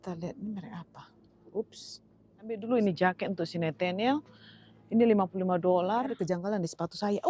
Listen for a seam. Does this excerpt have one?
yes; 2 cuts; at 2.6 s, 6.1 s

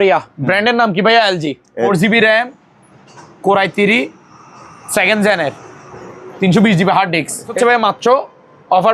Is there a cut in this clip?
yes; 2 cuts; at 1.9 s, 7.5 s

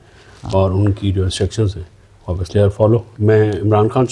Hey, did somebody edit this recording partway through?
no; 0 cuts

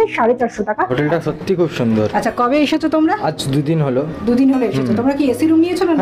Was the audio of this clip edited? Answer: yes; 1 cut; at 0.9 s

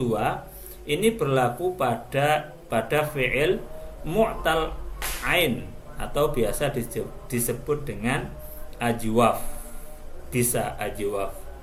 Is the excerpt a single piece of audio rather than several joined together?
no; 1 cut; at 2.6 s

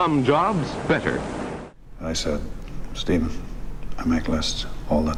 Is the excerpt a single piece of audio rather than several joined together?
yes; 0 cuts

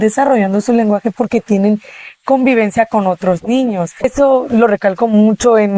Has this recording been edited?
yes; 1 cut; at 4.1 s

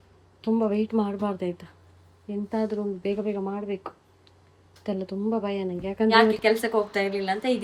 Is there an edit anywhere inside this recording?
yes; 1 cut; at 6.4 s

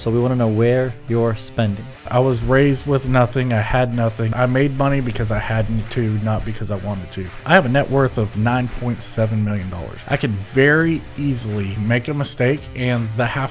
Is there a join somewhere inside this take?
yes; 5 cuts; at 2.0 s, 4.3 s, 7.4 s, 9.9 s, 11.8 s

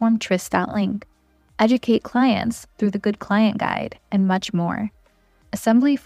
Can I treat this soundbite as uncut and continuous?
yes; 0 cuts

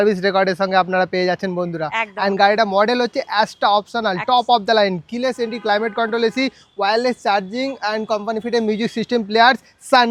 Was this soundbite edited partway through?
no; 0 cuts

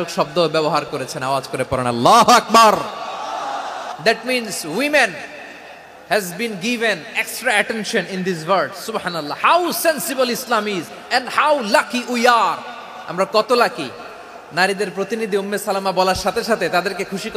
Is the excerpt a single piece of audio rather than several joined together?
no; 1 cut; at 3.8 s

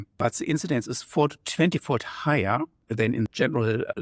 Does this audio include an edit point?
no; 0 cuts

